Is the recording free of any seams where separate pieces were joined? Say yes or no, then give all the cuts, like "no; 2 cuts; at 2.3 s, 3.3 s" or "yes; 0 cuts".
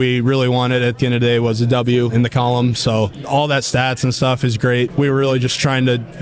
no; 3 cuts; at 2.1 s, 3.2 s, 4.9 s